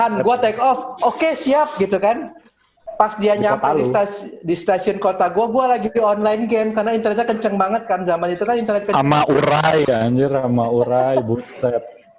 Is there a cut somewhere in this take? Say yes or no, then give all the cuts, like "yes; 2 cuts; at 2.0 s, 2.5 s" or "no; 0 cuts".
yes; 1 cut; at 2.8 s